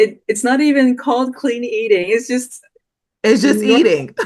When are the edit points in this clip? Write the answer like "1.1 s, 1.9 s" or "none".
none

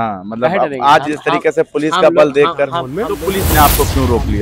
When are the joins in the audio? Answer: 3.0 s

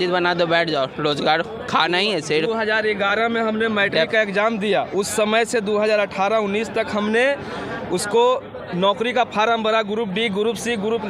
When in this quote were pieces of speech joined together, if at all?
none

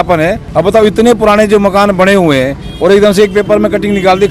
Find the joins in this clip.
none

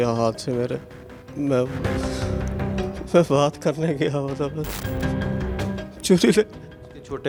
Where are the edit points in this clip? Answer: none

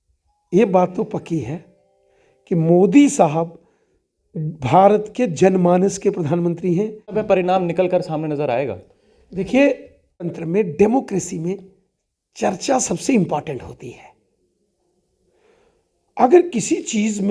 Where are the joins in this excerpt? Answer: 7.1 s, 10.4 s

